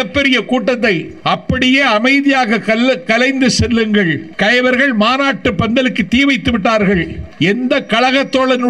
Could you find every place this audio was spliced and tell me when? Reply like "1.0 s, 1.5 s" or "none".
1.1 s, 4.3 s, 7.2 s